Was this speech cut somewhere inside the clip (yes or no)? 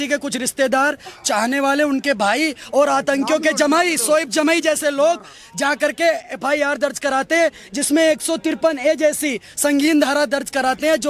no